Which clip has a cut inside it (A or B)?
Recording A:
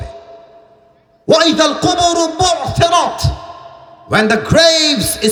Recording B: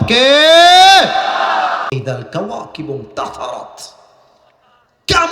B